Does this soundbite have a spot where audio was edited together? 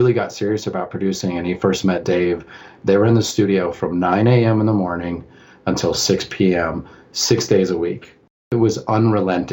yes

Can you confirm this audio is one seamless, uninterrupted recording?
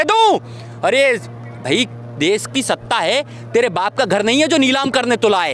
yes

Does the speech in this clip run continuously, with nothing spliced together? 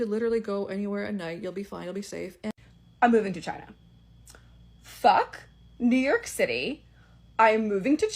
no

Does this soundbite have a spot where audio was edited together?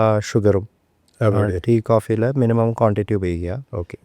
no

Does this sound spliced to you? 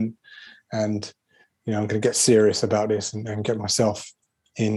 no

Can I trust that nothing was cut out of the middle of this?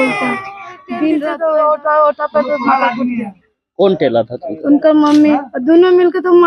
no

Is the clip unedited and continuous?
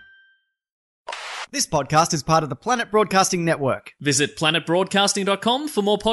no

